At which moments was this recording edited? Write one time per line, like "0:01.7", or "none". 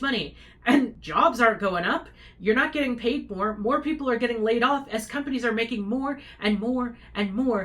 0:01.0